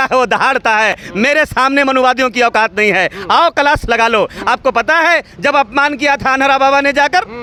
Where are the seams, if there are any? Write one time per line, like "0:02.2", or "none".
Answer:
none